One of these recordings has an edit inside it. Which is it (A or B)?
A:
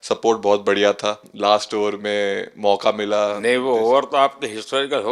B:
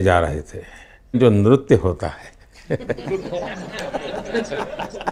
A